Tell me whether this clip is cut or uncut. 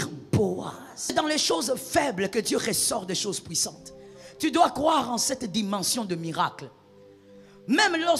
cut